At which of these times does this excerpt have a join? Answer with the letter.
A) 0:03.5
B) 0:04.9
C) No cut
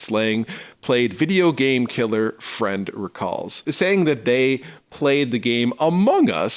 A